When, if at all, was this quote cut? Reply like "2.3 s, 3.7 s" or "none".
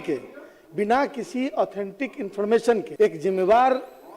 2.9 s